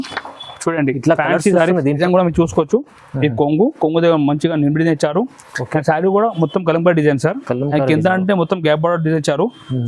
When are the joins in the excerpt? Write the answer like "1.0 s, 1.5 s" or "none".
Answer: 2.0 s